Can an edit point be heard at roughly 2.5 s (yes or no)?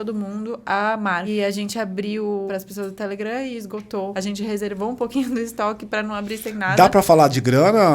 yes